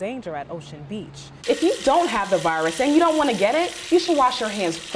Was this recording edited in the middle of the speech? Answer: yes; 1 cut; at 1.3 s

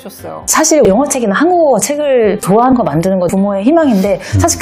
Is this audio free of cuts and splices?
yes; 0 cuts

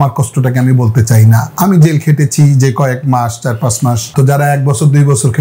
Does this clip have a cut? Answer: yes; 1 cut; at 4.1 s

